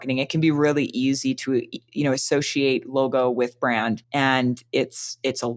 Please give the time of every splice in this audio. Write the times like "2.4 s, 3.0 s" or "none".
4.0 s